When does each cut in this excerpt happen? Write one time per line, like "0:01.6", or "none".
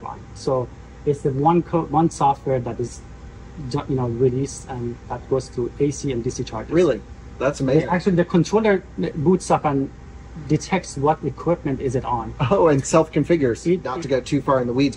0:13.8